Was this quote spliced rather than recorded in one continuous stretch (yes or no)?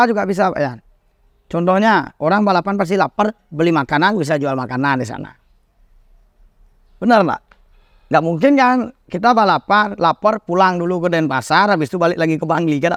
no